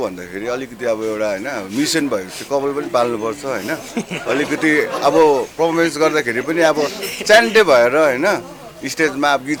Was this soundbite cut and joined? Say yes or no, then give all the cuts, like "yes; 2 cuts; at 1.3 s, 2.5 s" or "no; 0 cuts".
no; 0 cuts